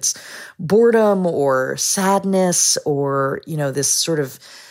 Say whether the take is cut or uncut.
uncut